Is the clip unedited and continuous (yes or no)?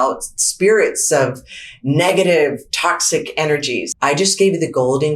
no